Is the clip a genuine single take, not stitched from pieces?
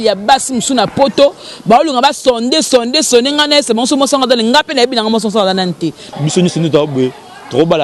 no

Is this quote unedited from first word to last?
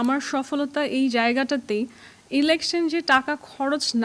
yes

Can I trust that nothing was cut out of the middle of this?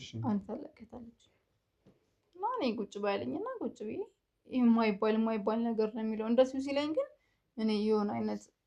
yes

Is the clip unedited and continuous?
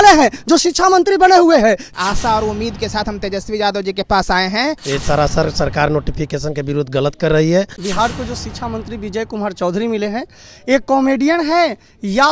no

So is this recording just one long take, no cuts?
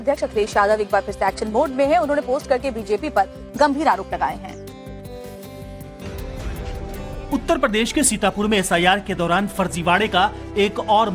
no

